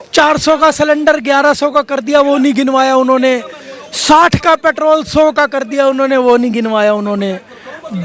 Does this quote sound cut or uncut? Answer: uncut